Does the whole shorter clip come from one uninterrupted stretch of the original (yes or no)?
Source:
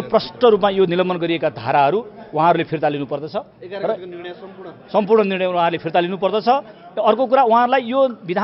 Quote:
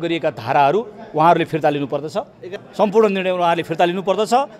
no